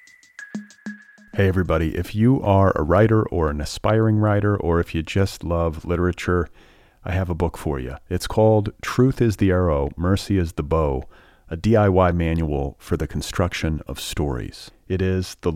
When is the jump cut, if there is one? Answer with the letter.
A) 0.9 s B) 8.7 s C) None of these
A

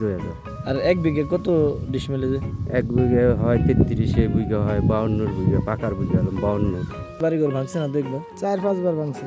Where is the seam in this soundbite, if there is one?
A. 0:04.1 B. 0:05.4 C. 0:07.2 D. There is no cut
C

